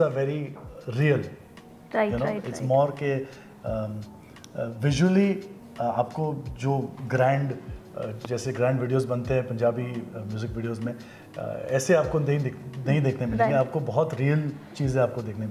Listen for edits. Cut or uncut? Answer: uncut